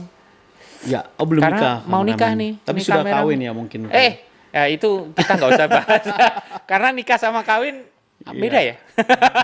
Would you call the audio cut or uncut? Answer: uncut